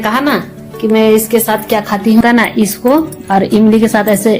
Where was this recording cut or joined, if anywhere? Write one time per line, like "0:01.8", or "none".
0:02.2

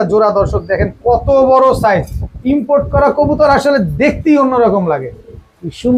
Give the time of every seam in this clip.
none

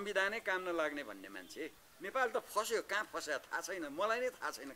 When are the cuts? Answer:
0:01.9

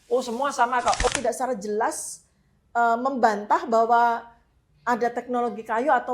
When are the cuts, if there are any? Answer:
0:01.1

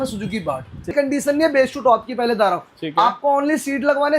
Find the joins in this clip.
0:00.9

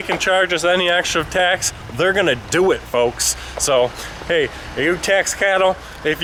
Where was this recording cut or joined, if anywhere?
none

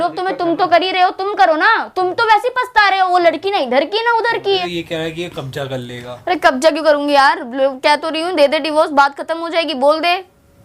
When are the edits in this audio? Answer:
0:04.6

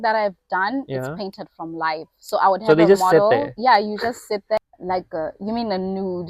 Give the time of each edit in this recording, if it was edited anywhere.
0:04.6

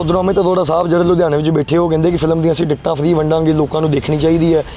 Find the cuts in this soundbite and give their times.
none

